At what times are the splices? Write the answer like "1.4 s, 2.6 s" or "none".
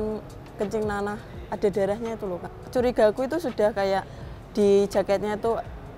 2.5 s